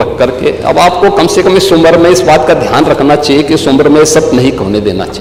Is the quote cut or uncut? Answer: uncut